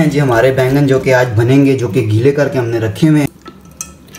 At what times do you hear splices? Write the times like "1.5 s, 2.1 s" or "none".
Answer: 3.3 s